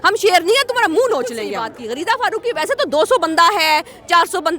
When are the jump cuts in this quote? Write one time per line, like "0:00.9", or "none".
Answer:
0:01.7